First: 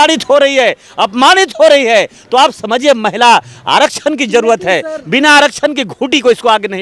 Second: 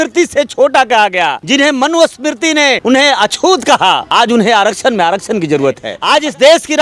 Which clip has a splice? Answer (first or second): second